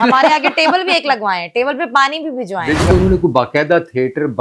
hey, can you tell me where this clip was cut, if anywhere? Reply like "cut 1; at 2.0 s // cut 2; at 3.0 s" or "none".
cut 1; at 2.9 s